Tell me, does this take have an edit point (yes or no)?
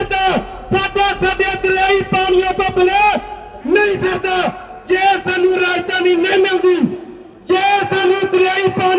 no